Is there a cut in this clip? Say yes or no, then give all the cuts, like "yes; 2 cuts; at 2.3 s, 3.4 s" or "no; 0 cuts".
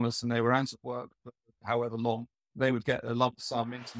yes; 1 cut; at 2.4 s